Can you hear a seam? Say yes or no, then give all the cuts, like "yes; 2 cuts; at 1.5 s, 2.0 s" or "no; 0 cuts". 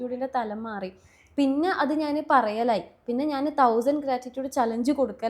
no; 0 cuts